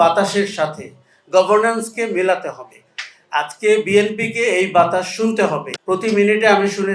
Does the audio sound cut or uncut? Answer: cut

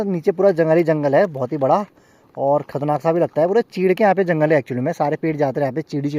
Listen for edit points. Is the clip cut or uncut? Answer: uncut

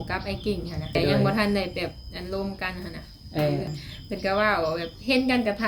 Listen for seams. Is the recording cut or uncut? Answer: cut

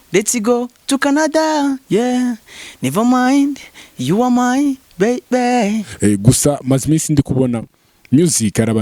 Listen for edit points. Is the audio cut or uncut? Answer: cut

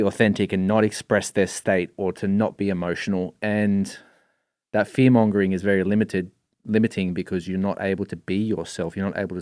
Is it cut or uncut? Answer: uncut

